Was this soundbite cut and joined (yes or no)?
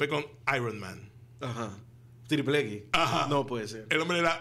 no